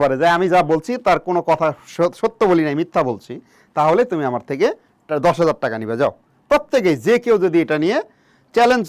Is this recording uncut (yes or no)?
yes